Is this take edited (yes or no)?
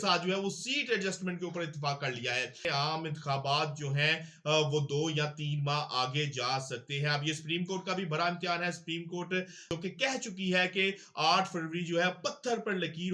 yes